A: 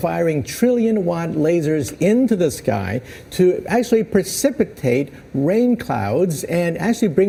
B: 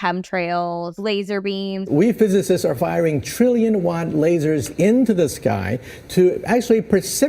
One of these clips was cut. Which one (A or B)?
B